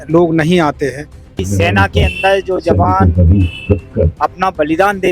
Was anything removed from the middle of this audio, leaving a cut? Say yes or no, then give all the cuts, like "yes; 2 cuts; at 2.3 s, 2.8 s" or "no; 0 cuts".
yes; 1 cut; at 1.5 s